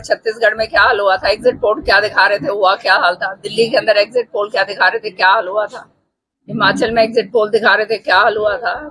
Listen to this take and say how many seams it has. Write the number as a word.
zero